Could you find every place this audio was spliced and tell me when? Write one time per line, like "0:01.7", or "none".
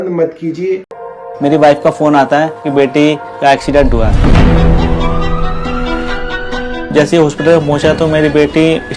0:01.0